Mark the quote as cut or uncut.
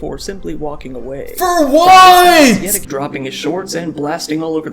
cut